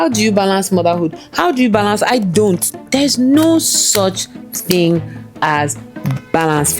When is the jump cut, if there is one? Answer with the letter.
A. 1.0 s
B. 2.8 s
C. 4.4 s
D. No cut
B